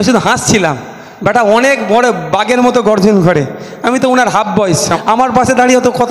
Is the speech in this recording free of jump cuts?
no; 1 cut; at 4.9 s

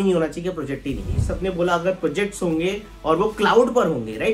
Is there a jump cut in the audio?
yes; 1 cut; at 1.3 s

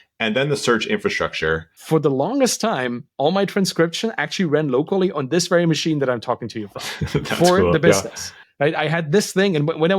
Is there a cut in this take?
yes; 1 cut; at 1.7 s

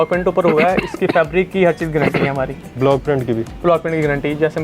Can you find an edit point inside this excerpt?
no; 0 cuts

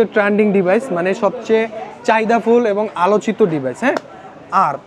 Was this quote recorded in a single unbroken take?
yes; 0 cuts

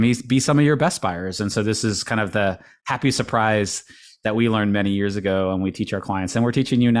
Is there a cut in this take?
no; 0 cuts

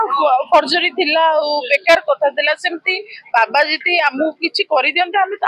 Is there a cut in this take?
no; 0 cuts

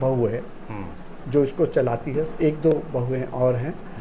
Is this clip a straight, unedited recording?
no; 1 cut; at 2.3 s

